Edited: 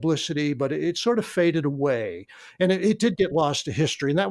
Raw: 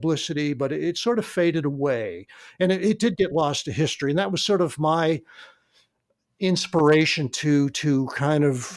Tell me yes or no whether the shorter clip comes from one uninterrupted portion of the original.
yes